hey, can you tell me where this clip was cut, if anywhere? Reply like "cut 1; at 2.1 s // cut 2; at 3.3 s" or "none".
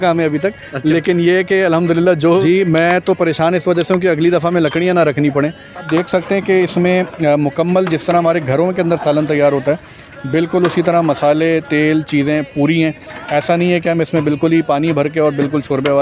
cut 1; at 2.4 s // cut 2; at 5.9 s